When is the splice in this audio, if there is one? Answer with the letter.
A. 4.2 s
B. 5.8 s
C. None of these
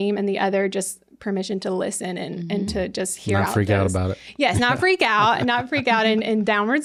C